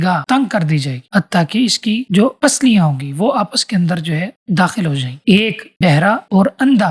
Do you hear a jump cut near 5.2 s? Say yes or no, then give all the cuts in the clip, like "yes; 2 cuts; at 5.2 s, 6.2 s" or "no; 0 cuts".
yes; 1 cut; at 5.2 s